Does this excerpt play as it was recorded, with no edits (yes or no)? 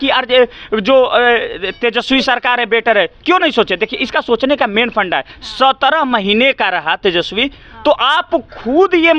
yes